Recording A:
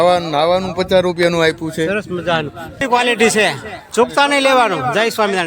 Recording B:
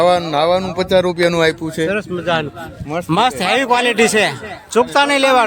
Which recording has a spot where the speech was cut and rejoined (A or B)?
A